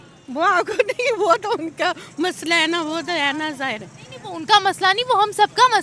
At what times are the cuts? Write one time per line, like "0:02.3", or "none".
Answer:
none